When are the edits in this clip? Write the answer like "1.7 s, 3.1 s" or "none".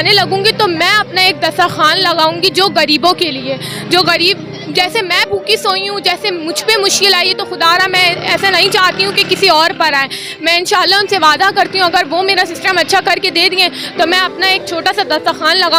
none